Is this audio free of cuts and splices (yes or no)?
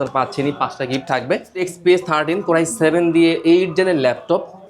no